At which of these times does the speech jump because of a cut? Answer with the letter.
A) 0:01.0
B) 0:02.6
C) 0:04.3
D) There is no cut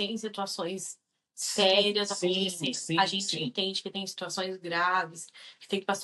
D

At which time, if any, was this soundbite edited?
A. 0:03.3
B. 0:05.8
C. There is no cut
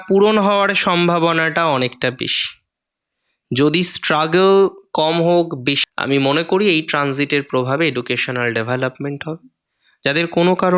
B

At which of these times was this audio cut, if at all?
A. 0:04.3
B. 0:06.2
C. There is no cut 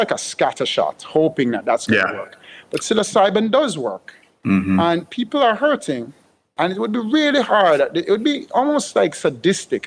C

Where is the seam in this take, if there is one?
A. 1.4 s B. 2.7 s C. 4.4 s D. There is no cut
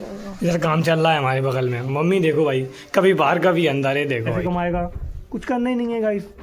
C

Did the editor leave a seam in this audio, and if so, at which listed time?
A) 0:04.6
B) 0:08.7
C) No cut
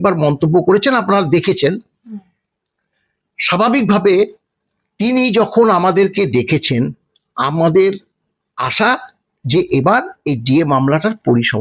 C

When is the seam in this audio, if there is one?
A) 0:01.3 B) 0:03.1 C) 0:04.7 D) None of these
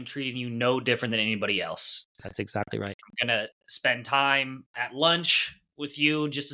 C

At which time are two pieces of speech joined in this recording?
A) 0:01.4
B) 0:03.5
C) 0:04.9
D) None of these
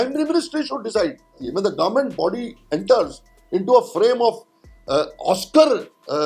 A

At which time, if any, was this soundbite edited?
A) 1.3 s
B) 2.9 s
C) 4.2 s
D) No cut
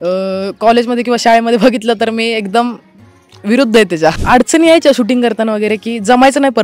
C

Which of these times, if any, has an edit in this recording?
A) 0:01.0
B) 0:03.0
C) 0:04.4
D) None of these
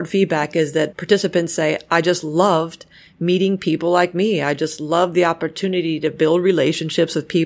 A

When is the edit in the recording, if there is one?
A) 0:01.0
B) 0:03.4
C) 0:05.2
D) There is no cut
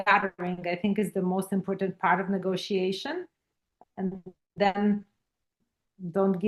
D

